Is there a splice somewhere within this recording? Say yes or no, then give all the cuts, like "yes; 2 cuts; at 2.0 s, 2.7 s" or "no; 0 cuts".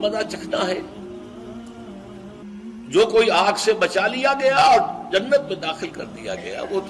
yes; 1 cut; at 2.4 s